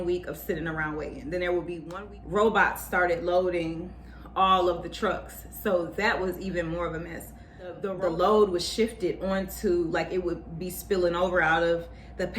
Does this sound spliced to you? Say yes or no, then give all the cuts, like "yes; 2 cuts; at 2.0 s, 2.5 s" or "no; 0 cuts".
yes; 2 cuts; at 1.8 s, 7.9 s